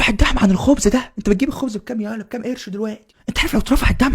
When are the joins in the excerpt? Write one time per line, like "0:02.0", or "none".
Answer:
0:03.1